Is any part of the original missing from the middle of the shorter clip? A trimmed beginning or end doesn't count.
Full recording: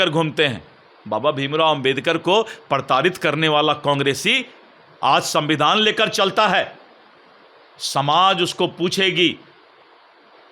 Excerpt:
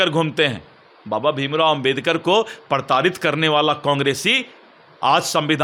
no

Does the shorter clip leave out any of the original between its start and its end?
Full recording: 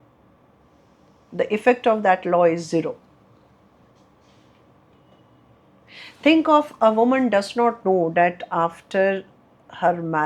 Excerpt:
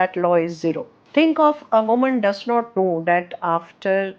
yes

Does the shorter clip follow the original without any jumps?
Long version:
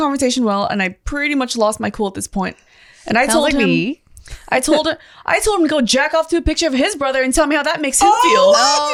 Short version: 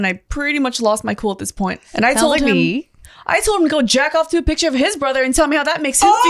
no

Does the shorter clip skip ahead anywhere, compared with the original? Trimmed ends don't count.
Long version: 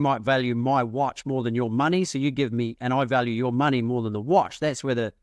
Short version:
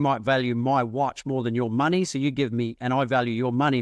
no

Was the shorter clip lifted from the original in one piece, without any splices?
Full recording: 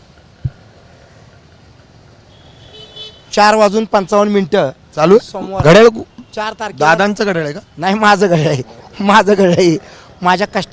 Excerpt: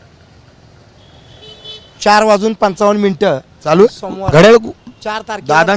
yes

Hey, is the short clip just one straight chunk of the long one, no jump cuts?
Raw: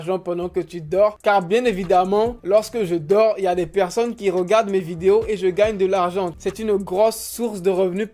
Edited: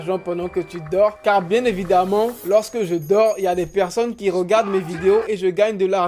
yes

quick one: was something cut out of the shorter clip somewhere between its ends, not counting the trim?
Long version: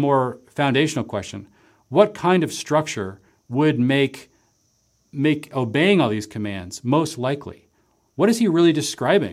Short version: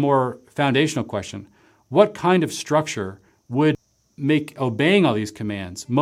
yes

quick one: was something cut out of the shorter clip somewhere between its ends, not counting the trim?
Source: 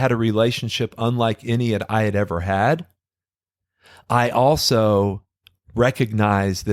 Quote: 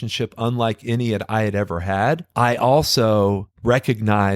yes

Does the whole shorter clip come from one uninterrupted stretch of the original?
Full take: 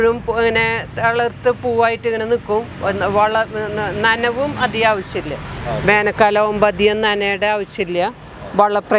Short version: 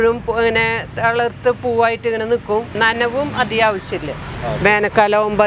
no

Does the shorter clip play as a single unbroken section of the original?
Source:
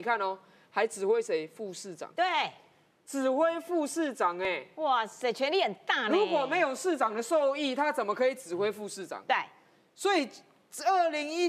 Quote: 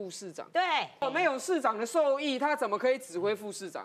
no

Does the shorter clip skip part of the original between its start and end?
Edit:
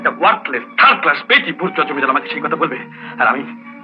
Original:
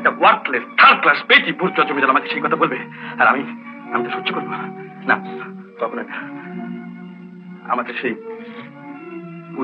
no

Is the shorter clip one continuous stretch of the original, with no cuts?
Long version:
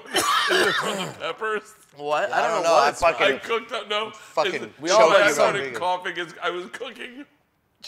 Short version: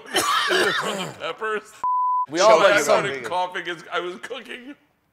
no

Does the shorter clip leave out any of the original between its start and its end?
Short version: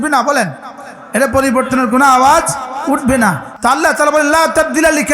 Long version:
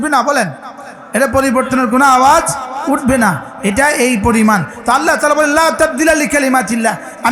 yes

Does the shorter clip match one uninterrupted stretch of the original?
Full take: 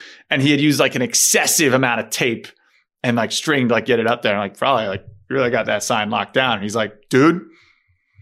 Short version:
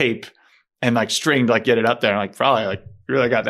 yes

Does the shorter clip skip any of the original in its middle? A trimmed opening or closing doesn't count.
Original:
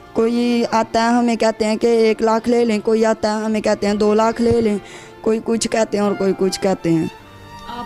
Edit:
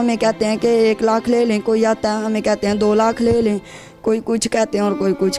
no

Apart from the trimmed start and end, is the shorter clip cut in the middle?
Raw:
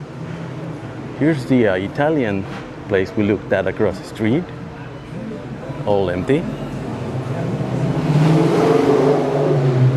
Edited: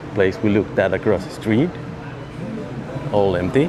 no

